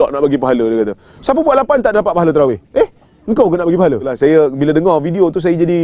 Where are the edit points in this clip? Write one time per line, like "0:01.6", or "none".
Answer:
0:04.1